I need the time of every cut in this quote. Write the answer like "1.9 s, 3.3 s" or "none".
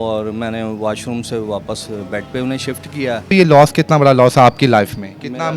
3.3 s